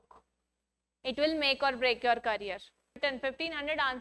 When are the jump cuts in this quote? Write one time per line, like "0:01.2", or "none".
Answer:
0:03.0